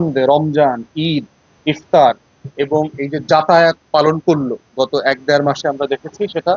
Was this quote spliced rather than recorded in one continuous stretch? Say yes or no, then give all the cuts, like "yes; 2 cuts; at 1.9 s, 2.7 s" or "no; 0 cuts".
no; 0 cuts